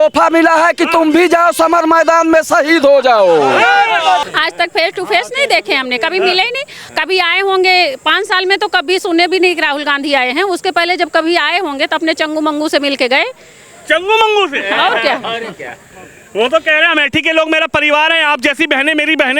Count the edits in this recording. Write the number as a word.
one